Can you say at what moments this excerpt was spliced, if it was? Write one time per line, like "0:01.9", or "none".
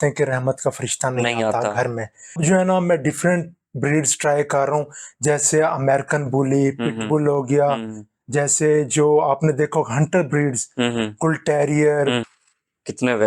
0:02.4
0:12.2